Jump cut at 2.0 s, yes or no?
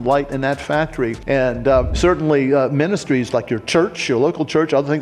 yes